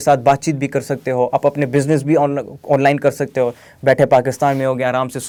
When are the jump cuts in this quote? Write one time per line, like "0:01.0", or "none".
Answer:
none